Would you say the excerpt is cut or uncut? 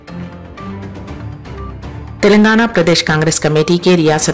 cut